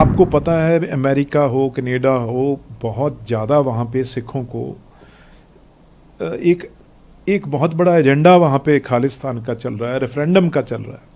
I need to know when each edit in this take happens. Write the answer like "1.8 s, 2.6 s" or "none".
none